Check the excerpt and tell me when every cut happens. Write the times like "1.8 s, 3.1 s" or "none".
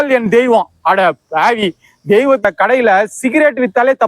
2.4 s